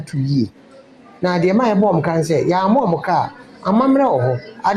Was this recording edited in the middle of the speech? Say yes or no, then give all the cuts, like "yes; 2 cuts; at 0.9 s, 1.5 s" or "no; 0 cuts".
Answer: no; 0 cuts